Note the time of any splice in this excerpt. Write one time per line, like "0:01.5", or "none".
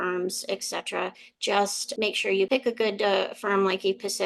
0:02.0